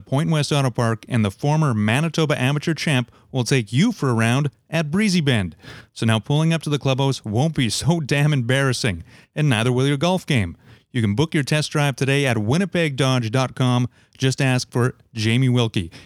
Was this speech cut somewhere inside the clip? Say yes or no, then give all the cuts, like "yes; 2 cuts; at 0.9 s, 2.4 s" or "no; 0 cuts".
no; 0 cuts